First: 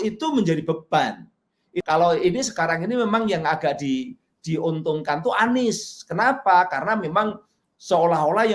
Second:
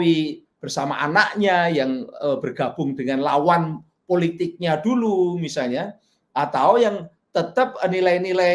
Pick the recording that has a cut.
first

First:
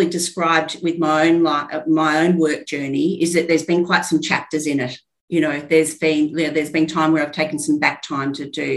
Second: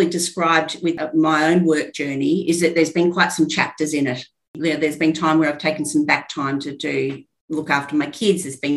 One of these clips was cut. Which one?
second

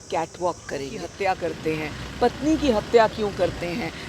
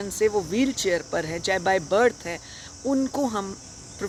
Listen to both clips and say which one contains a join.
first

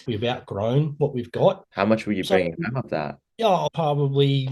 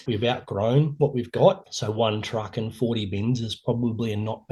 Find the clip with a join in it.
first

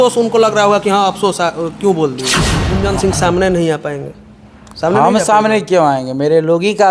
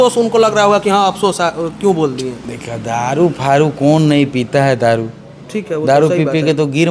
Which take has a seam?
first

